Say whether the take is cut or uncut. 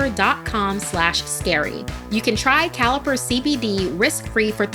cut